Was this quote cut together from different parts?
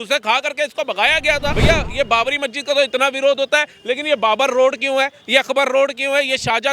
yes; 1 cut; at 1.6 s

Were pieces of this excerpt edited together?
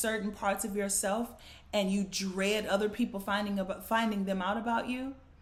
no; 0 cuts

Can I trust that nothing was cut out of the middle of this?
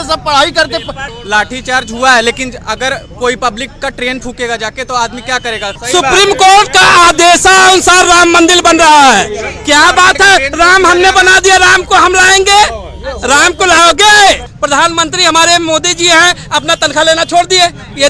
no; 3 cuts; at 1.1 s, 5.8 s, 14.5 s

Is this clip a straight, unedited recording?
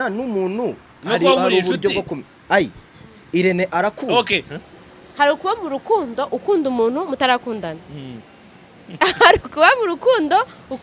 no; 1 cut; at 4.5 s

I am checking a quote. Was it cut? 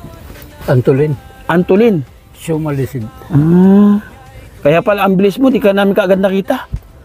no; 0 cuts

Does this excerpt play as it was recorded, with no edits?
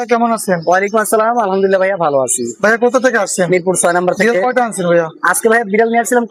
yes; 0 cuts

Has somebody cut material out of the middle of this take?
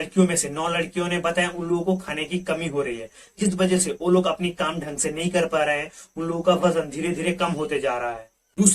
no; 0 cuts

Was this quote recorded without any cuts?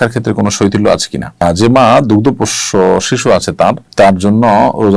yes; 0 cuts

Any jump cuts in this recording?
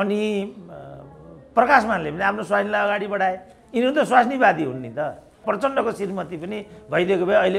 yes; 1 cut; at 5.4 s

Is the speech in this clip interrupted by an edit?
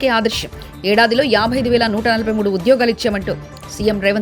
no; 0 cuts

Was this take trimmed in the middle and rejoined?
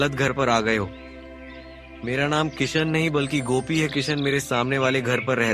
no; 0 cuts

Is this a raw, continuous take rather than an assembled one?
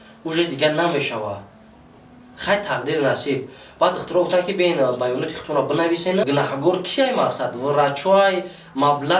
no; 1 cut; at 6.2 s

